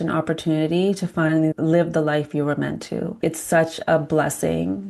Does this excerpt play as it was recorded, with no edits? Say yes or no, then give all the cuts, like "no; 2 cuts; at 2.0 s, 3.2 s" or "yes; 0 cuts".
no; 2 cuts; at 1.5 s, 3.1 s